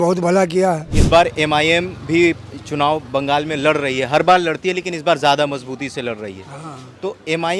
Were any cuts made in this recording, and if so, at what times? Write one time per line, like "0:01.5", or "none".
0:00.9